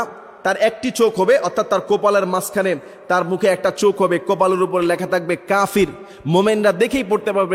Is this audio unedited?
yes; 0 cuts

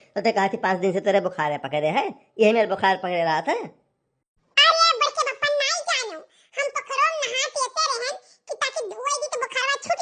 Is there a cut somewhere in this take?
no; 0 cuts

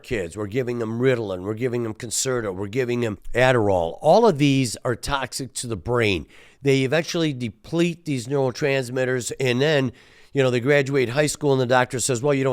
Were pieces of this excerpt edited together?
yes; 1 cut; at 3.2 s

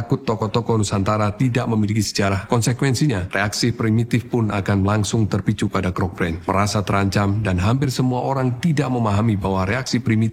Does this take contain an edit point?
no; 0 cuts

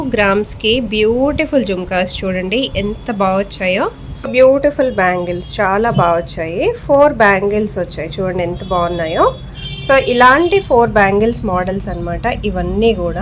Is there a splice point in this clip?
yes; 1 cut; at 4.3 s

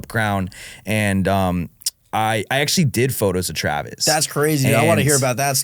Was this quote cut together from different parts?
no; 0 cuts

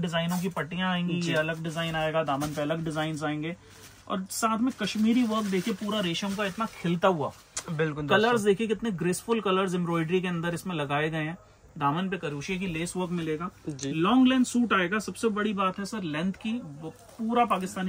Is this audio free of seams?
yes; 0 cuts

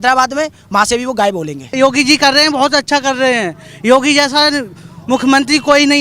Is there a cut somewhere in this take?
yes; 1 cut; at 1.8 s

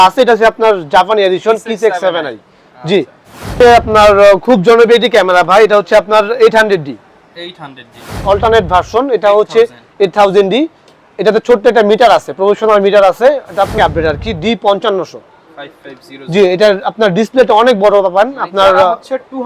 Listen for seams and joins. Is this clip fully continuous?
no; 3 cuts; at 3.5 s, 8.2 s, 13.8 s

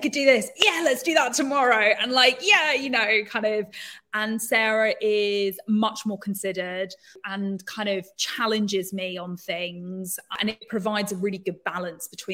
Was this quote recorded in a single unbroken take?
no; 2 cuts; at 7.2 s, 10.4 s

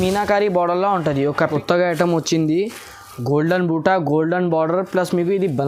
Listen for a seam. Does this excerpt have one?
yes; 1 cut; at 1.4 s

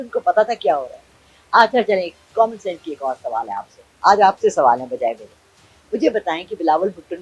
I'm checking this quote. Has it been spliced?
no; 0 cuts

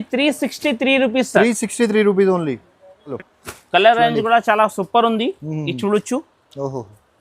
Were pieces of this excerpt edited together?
yes; 1 cut; at 3.1 s

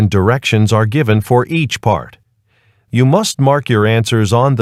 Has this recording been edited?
no; 0 cuts

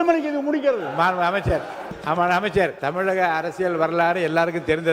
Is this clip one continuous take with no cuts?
no; 2 cuts; at 1.9 s, 2.8 s

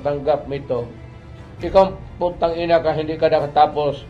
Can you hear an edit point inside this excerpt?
no; 0 cuts

